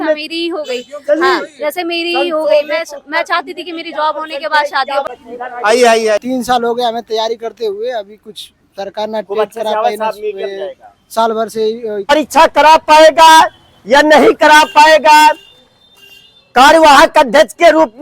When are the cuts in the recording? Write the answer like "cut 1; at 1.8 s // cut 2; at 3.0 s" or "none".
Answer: cut 1; at 5.0 s // cut 2; at 12.1 s

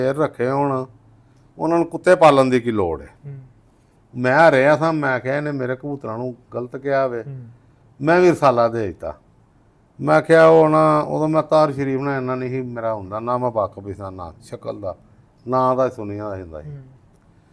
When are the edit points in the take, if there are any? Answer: none

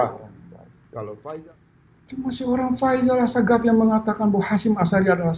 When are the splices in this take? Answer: cut 1; at 1.4 s

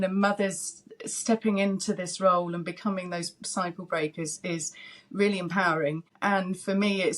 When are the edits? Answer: cut 1; at 6.1 s

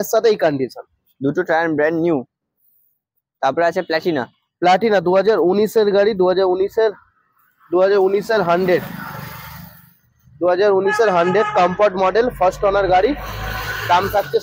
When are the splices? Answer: none

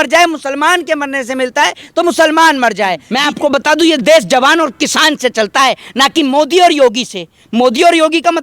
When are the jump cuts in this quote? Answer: cut 1; at 3.1 s

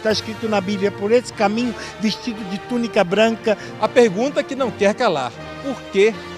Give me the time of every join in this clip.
cut 1; at 3.7 s

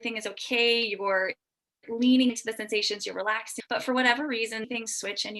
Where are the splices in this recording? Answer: cut 1; at 3.5 s // cut 2; at 4.7 s

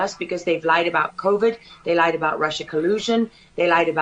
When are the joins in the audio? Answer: none

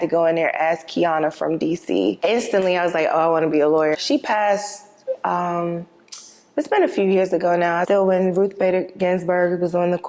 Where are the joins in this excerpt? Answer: cut 1; at 2.2 s // cut 2; at 3.9 s // cut 3; at 7.8 s

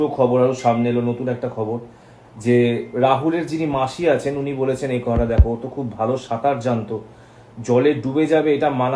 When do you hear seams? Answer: none

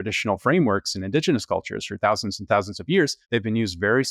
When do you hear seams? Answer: cut 1; at 3.2 s

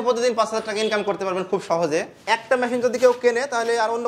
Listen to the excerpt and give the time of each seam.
cut 1; at 2.1 s

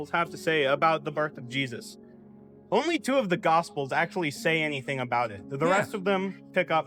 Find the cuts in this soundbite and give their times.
none

